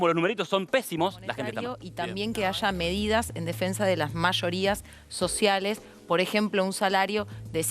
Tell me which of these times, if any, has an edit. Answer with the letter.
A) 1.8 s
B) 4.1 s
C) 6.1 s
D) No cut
A